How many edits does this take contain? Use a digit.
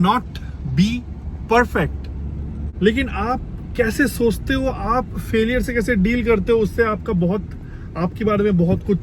0